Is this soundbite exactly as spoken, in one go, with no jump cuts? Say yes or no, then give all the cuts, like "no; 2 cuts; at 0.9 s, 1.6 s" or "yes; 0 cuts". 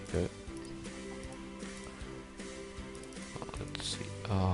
no; 1 cut; at 3.6 s